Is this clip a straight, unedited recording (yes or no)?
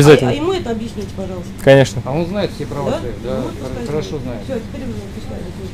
yes